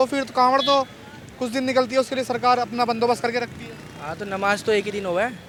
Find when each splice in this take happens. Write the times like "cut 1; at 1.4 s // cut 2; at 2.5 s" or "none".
none